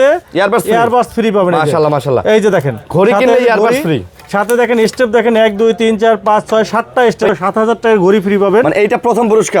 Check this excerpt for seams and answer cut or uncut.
cut